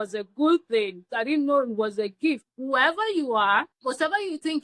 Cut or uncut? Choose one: cut